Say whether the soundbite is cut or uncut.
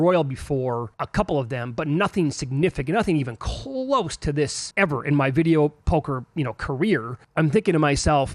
cut